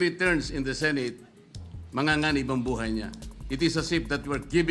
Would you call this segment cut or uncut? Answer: uncut